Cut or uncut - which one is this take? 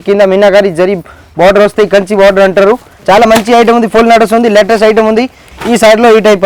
cut